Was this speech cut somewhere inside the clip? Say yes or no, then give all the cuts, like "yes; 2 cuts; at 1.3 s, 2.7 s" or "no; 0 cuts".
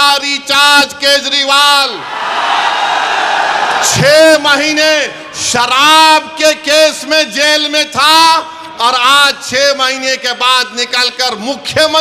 no; 0 cuts